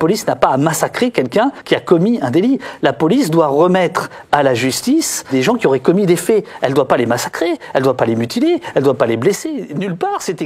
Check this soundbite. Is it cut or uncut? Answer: cut